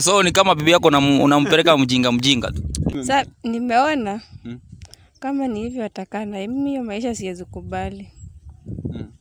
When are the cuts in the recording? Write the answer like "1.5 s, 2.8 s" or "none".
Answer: 3.0 s